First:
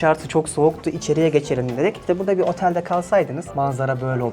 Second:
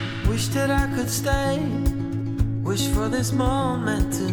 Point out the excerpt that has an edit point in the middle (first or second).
first